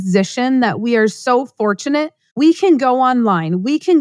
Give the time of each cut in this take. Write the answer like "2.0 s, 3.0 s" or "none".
2.2 s